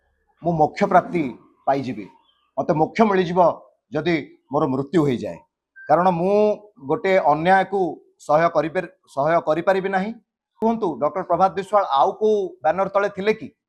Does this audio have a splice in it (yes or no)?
yes